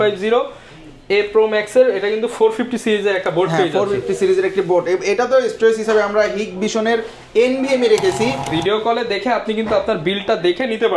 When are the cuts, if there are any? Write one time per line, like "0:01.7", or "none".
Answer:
0:08.5